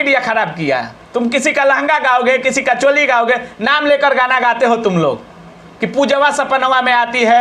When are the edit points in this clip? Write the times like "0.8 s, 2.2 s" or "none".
none